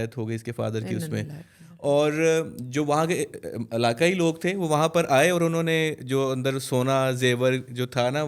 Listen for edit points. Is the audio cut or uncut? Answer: uncut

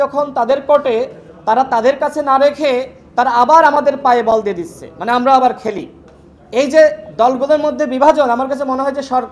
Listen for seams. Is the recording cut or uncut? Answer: uncut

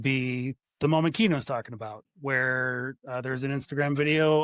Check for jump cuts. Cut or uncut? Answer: cut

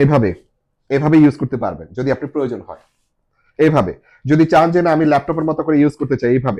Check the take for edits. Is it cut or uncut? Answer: uncut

